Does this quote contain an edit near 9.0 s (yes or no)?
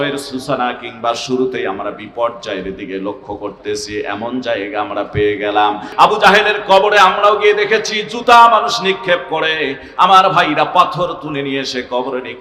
no